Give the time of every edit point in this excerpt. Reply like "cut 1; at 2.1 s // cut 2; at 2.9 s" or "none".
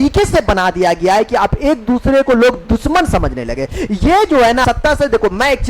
cut 1; at 4.6 s